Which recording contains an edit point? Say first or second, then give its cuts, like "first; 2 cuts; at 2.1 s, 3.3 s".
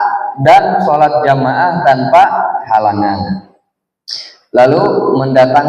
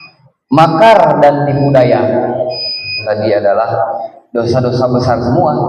second; 1 cut; at 3.0 s